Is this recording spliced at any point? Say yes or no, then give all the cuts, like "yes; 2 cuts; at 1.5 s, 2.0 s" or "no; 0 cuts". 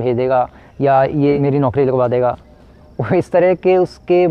yes; 1 cut; at 1.4 s